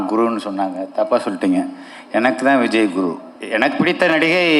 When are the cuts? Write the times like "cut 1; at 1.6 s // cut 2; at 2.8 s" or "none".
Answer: cut 1; at 3.3 s